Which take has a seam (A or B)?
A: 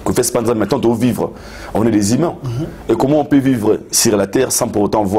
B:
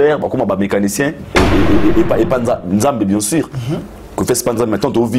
B